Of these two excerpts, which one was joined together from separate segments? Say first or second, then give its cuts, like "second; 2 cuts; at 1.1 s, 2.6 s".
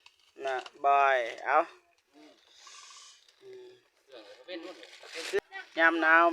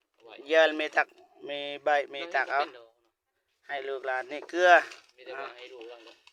first; 1 cut; at 5.4 s